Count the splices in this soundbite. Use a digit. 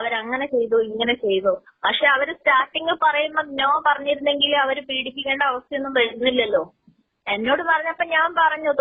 0